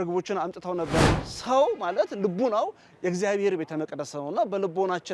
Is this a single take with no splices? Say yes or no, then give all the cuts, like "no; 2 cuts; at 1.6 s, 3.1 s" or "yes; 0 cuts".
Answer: no; 1 cut; at 1.0 s